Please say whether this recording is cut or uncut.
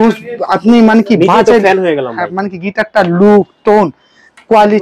uncut